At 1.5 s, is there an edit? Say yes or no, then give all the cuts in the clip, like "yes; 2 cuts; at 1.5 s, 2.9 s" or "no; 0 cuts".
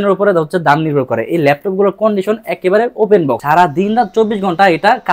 no; 1 cut; at 3.4 s